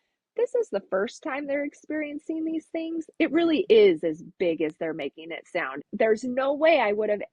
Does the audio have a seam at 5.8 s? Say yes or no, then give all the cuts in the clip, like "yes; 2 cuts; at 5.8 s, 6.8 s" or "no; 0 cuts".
yes; 1 cut; at 5.8 s